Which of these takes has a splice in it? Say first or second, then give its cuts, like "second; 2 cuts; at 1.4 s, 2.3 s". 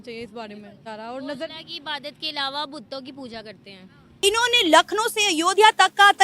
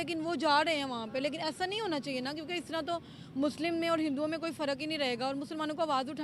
first; 2 cuts; at 0.8 s, 4.1 s